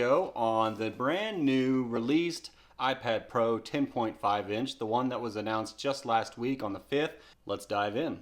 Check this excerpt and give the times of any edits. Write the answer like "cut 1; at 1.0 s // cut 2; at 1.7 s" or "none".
cut 1; at 7.3 s